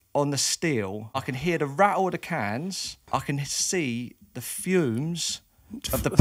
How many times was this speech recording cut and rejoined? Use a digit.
2